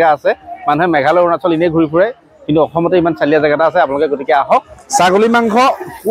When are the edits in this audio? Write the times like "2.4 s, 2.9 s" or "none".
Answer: 4.8 s